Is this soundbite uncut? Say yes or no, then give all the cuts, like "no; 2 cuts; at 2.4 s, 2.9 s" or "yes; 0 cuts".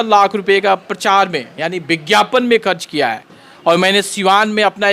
yes; 0 cuts